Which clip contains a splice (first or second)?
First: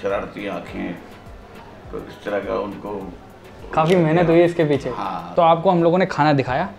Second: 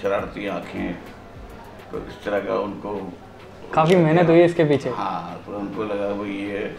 first